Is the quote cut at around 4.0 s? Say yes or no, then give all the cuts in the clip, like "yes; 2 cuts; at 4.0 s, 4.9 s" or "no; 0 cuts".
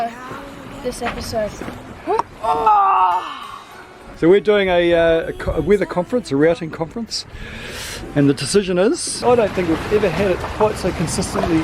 yes; 2 cuts; at 4.0 s, 9.2 s